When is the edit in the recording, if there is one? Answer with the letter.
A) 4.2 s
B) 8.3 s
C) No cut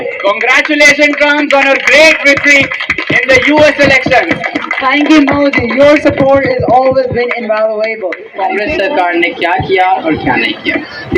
B